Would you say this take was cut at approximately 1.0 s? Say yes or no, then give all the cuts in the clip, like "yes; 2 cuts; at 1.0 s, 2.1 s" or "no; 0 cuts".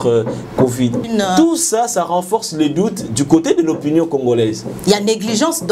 yes; 1 cut; at 1.0 s